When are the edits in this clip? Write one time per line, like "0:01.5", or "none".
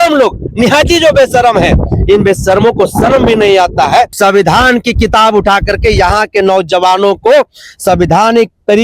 0:04.1

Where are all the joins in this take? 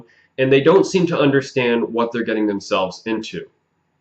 0:01.8

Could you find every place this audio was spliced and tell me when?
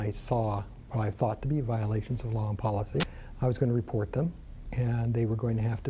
0:03.2

